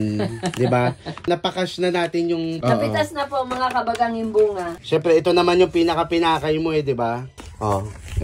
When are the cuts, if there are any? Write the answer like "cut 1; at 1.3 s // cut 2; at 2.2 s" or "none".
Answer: none